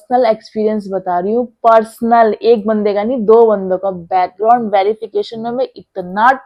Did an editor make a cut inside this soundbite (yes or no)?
no